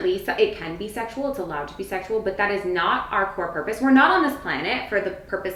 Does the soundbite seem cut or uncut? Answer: uncut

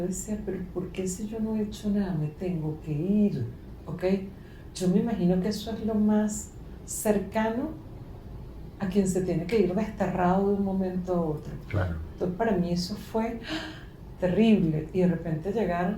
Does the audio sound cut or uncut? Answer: uncut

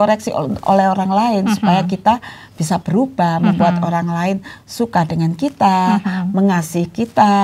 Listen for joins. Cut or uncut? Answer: uncut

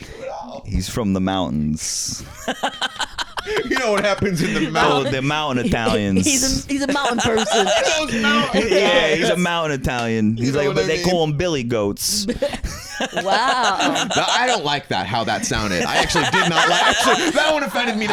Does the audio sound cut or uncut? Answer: uncut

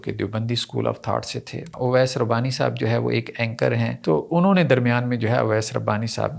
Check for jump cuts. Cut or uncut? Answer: cut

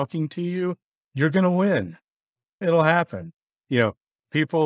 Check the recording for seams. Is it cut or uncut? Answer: uncut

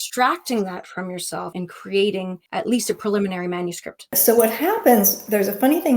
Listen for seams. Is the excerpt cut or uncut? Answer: cut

